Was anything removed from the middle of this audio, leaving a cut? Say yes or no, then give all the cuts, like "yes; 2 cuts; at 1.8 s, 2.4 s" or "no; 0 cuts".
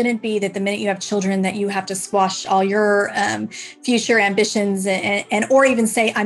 no; 0 cuts